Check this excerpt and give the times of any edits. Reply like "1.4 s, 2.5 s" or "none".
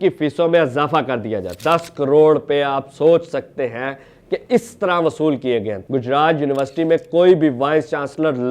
1.5 s, 5.8 s